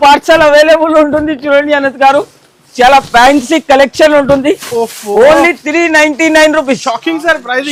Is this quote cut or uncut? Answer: uncut